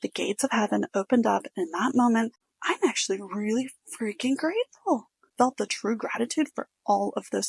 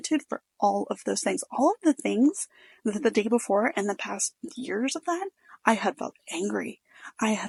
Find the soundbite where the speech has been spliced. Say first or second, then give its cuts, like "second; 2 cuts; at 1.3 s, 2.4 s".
first; 2 cuts; at 2.4 s, 5.3 s